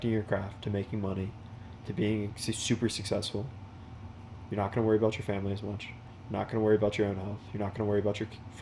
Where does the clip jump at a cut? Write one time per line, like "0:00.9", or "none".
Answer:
none

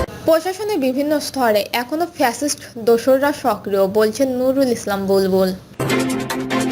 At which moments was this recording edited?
0:05.6

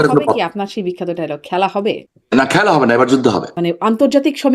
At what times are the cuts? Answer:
0:02.1
0:03.5

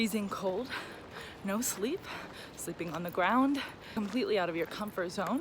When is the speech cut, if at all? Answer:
0:03.9

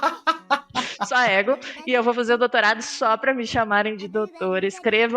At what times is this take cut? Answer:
0:01.0

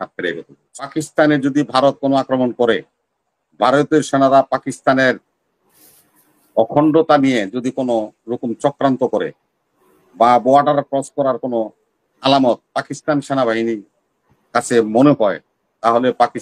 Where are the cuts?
0:00.9

